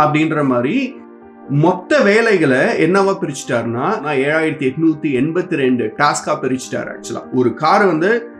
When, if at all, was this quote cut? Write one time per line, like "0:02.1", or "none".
0:01.0
0:04.0